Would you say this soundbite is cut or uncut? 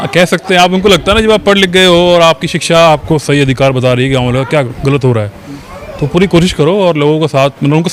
uncut